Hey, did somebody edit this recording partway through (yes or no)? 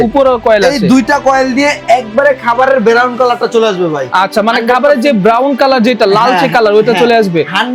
no